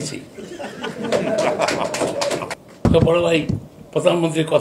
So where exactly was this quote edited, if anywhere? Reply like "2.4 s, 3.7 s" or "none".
2.5 s